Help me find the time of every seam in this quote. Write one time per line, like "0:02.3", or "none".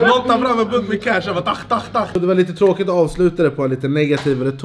0:02.2

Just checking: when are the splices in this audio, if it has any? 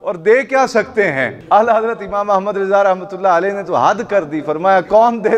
0:01.3

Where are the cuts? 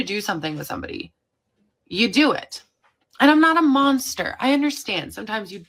none

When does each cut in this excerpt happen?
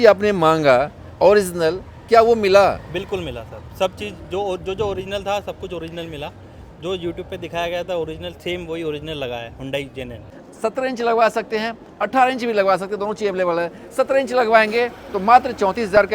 0:10.3

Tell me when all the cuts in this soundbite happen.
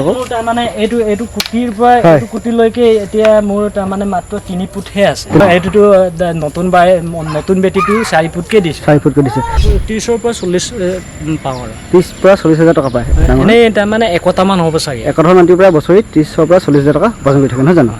0:05.4
0:09.6
0:13.0

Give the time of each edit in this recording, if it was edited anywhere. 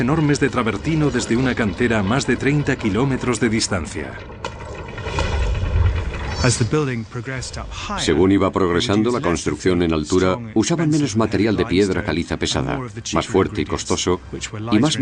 none

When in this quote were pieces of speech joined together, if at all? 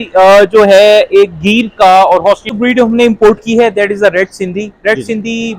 0:02.5

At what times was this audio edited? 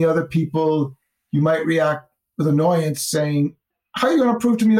none

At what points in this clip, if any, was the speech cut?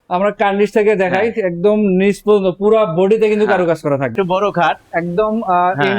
0:04.1

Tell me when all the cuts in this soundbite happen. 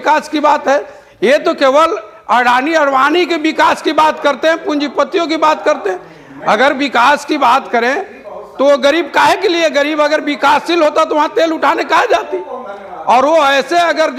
none

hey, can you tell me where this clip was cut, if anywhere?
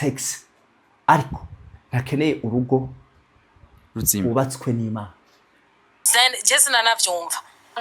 0:06.0

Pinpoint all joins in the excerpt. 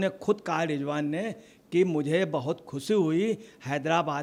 none

